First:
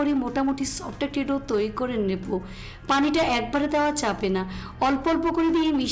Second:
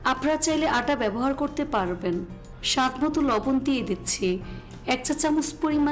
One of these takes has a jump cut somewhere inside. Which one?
second; 2 cuts; at 2.4 s, 4.5 s

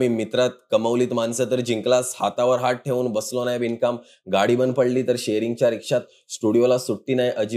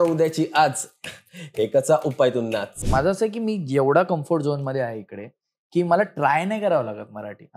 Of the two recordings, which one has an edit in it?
second; 1 cut; at 2.9 s

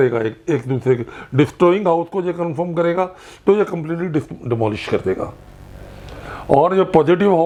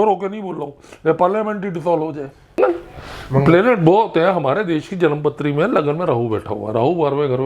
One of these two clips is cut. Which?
second; 1 cut; at 2.6 s

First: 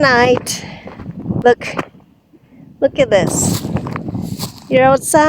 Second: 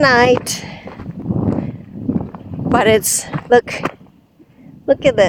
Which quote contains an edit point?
first; 1 cut; at 1.4 s

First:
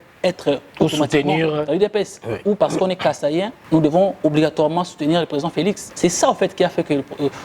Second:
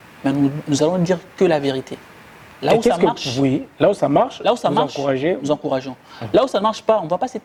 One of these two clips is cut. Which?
first; 2 cuts; at 3.6 s, 5.9 s

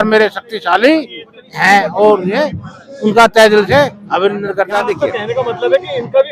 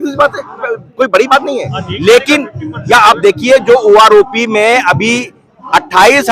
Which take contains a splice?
first; 1 cut; at 4.9 s

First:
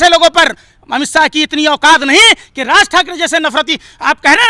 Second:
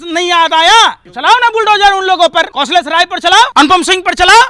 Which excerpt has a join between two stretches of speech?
second; 3 cuts; at 1.1 s, 2.5 s, 3.5 s

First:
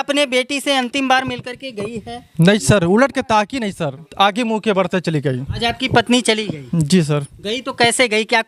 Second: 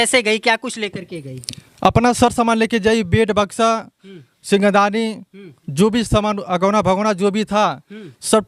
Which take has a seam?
first; 2 cuts; at 4.0 s, 5.5 s

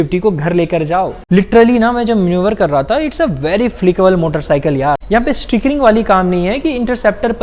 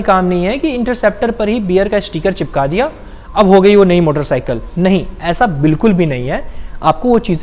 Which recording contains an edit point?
first; 2 cuts; at 1.2 s, 5.0 s

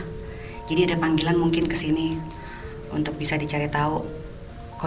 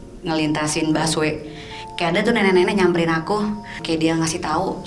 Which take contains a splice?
second; 1 cut; at 3.8 s

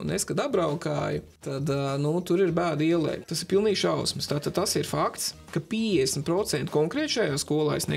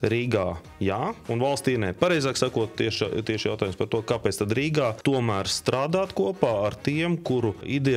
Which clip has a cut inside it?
first; 1 cut; at 3.2 s

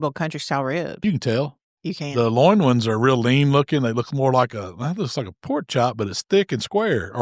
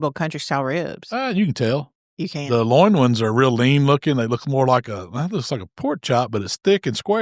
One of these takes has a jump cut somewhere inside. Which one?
first; 1 cut; at 1.0 s

